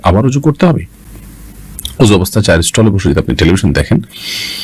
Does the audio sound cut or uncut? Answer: uncut